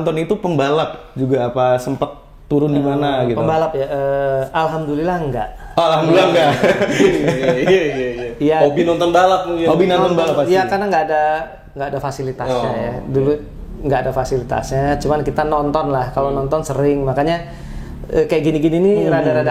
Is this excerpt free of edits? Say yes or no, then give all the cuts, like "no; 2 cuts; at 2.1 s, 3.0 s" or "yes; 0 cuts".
yes; 0 cuts